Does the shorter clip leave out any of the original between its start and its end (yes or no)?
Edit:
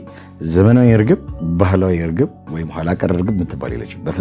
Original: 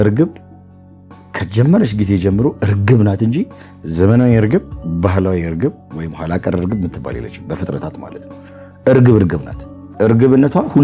no